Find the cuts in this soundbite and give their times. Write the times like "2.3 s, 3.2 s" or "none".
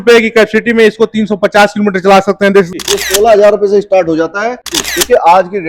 2.7 s, 4.7 s